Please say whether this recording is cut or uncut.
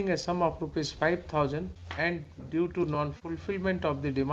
cut